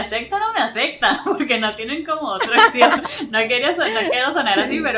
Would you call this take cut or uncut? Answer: uncut